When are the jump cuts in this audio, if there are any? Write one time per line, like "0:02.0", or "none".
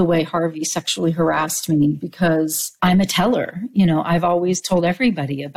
0:02.6